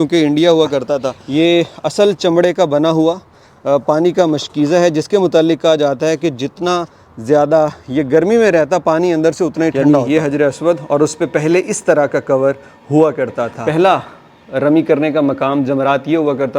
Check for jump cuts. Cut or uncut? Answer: cut